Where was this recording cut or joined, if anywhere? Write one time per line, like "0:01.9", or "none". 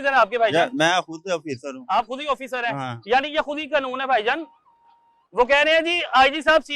none